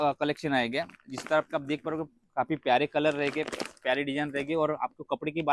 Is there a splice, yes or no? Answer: no